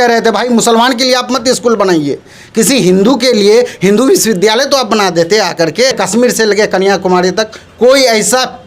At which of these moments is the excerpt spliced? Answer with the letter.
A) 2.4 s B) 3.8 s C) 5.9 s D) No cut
C